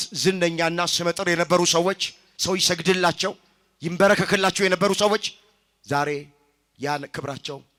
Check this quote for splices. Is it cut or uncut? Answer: uncut